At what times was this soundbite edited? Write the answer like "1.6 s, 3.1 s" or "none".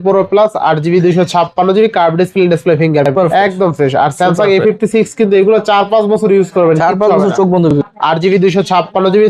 3.1 s, 7.7 s